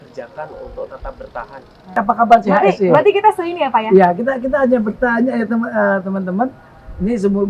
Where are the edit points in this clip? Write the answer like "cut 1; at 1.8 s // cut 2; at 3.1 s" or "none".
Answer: cut 1; at 1.9 s